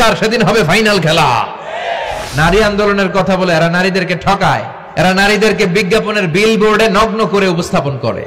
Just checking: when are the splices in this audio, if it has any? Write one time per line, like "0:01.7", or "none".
0:02.2
0:04.8